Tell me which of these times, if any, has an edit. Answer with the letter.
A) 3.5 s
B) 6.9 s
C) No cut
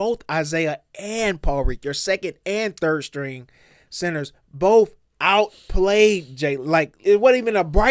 B